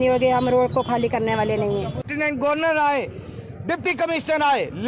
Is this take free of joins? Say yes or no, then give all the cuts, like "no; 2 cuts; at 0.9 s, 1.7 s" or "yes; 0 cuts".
no; 1 cut; at 2.0 s